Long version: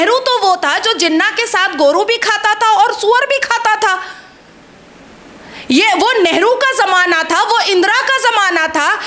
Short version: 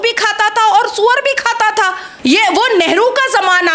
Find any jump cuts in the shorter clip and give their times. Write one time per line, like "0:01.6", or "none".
0:02.0